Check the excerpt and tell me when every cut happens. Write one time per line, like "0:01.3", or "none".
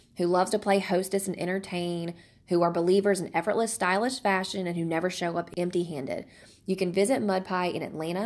0:05.5